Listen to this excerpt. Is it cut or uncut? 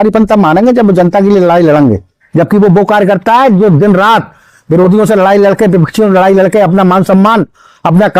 cut